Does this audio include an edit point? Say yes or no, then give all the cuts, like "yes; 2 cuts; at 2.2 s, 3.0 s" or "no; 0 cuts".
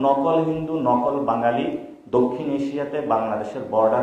no; 0 cuts